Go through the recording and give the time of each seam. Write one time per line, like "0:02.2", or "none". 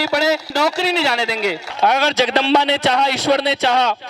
0:01.6